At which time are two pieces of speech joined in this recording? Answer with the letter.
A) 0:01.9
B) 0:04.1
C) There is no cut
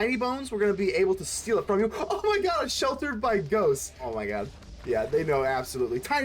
B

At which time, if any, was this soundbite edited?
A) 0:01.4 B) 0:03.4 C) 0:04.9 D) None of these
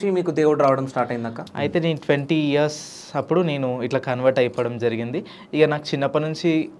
A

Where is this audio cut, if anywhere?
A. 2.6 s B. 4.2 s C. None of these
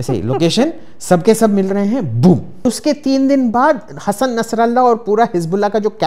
A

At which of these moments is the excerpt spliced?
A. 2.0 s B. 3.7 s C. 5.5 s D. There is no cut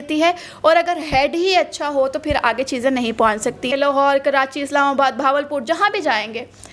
B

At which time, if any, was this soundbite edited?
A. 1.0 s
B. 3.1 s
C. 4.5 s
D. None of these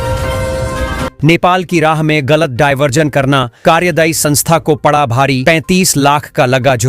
A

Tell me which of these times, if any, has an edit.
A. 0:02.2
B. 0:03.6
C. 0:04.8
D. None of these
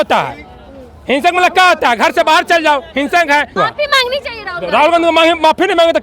B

